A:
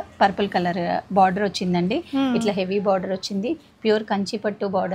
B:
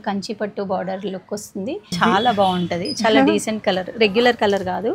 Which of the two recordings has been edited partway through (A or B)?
B